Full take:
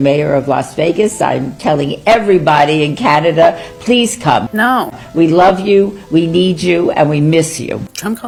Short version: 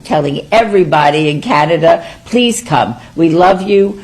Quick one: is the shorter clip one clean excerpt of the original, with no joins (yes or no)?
no